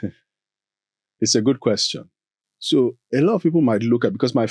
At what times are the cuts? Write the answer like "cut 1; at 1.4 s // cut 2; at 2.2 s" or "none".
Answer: none

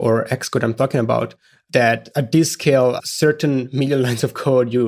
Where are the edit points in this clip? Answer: cut 1; at 1.8 s // cut 2; at 3.1 s

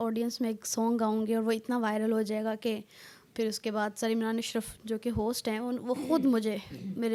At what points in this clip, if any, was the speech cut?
none

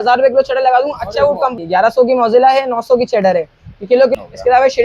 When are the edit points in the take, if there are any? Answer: cut 1; at 1.6 s // cut 2; at 4.1 s

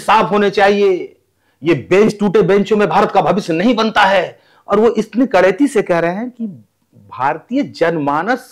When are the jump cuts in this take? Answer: none

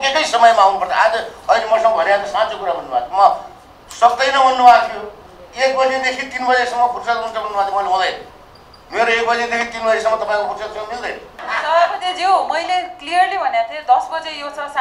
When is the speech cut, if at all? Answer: cut 1; at 11.4 s

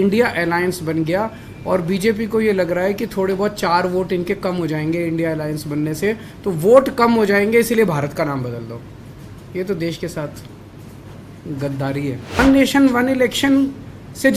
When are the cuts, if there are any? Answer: cut 1; at 12.4 s

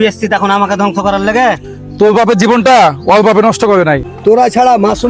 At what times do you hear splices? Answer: cut 1; at 4.1 s

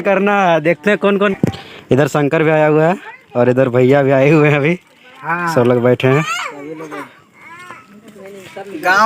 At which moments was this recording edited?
cut 1; at 1.3 s

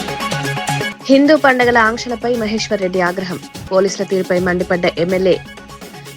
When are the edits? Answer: cut 1; at 1.0 s

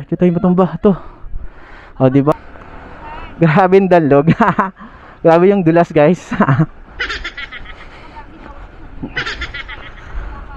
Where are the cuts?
cut 1; at 2.3 s

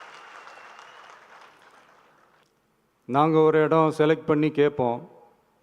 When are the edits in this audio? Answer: cut 1; at 2.4 s

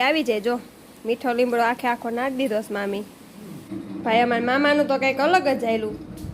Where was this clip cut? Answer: cut 1; at 3.6 s

